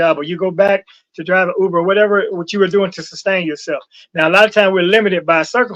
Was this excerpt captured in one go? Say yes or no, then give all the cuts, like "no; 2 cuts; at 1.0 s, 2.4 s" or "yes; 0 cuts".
yes; 0 cuts